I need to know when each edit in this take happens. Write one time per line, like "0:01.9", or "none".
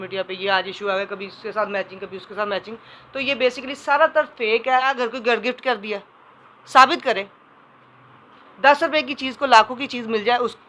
0:05.0

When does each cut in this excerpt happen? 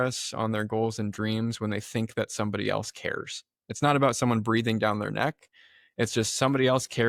none

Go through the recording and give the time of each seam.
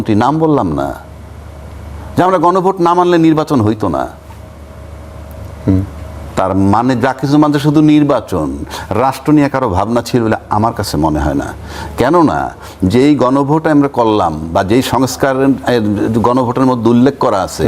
none

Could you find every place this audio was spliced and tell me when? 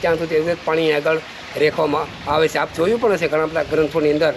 none

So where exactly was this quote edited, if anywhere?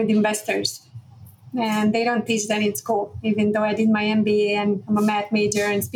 none

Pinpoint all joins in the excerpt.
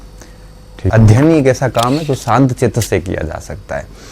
0:00.9

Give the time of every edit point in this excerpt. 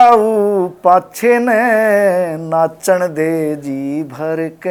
none

